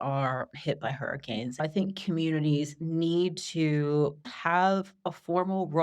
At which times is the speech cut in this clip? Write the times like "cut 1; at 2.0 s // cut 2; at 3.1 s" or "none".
cut 1; at 1.6 s // cut 2; at 4.2 s